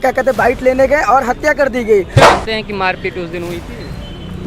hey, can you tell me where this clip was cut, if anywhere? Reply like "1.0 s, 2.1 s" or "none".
2.2 s